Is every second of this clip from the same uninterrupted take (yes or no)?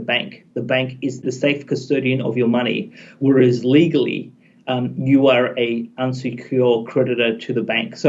yes